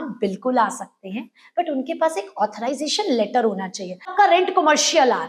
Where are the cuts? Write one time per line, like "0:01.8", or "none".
0:04.1